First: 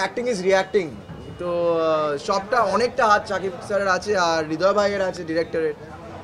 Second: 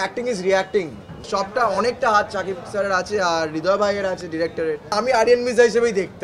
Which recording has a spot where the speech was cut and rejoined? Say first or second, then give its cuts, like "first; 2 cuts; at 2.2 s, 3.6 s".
second; 2 cuts; at 1.2 s, 4.9 s